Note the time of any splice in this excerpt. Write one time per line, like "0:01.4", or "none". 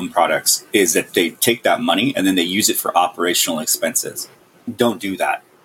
0:01.1
0:04.6